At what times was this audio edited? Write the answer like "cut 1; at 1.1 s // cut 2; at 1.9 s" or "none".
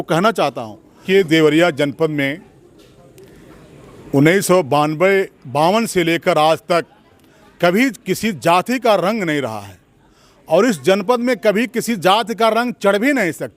cut 1; at 1.0 s